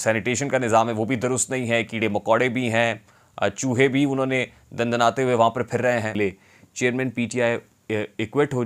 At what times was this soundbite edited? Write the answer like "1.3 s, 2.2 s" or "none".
6.1 s